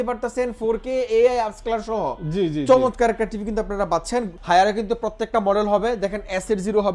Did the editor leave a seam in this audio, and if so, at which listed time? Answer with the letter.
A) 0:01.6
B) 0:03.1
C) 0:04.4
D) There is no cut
C